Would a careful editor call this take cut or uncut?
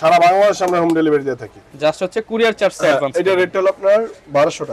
uncut